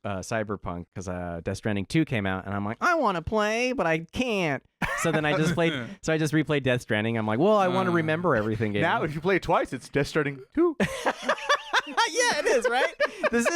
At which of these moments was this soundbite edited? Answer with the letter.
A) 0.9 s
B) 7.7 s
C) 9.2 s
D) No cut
A